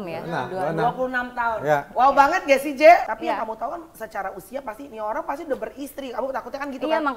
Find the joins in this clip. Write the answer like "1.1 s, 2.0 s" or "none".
3.1 s